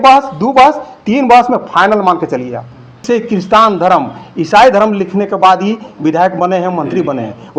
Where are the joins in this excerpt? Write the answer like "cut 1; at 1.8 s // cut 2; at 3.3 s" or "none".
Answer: cut 1; at 3.0 s